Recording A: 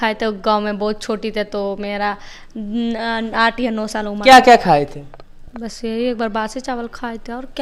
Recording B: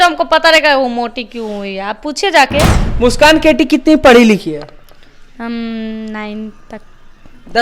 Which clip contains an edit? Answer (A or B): B